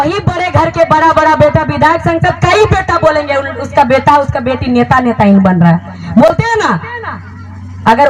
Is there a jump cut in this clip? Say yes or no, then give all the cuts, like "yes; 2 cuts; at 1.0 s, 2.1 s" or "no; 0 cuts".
no; 0 cuts